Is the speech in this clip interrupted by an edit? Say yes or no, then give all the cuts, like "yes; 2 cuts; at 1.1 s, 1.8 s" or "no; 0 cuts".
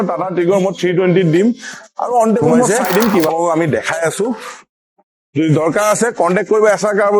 yes; 1 cut; at 3.3 s